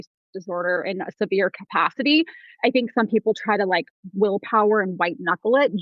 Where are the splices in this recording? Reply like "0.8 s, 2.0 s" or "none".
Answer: 2.5 s